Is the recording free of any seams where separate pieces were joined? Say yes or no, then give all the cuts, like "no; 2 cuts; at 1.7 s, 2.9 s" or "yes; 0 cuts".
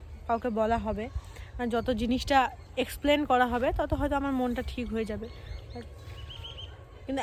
yes; 0 cuts